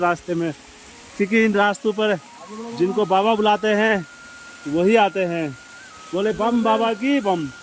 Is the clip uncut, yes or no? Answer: yes